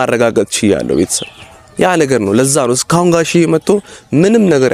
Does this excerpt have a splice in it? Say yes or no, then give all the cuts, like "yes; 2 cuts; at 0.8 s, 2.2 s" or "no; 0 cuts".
no; 0 cuts